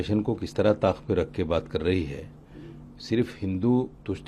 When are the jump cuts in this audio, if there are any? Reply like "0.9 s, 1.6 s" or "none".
none